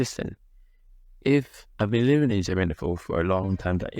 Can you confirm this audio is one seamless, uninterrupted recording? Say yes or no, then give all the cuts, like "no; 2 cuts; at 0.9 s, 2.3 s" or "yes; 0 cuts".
yes; 0 cuts